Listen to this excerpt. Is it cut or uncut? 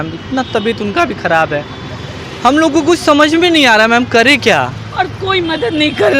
uncut